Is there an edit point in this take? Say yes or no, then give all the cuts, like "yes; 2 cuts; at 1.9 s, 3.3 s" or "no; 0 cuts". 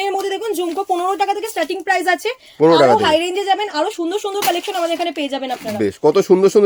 no; 0 cuts